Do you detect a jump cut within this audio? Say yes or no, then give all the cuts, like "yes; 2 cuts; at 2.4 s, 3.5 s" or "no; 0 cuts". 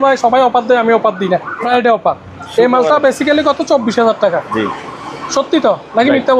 yes; 1 cut; at 1.6 s